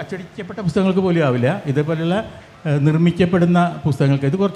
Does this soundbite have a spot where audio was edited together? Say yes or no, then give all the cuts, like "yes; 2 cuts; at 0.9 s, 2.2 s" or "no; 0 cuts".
no; 0 cuts